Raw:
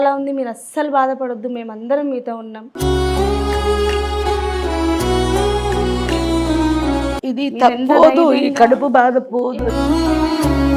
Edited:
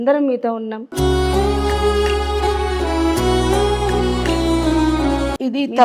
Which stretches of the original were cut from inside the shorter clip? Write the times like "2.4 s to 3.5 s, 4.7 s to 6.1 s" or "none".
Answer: none